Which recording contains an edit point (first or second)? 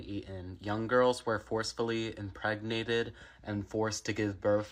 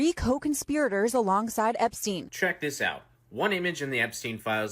second